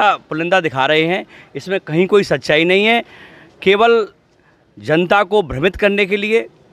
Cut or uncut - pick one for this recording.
uncut